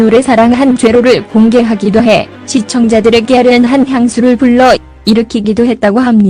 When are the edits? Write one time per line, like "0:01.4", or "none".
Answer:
0:05.1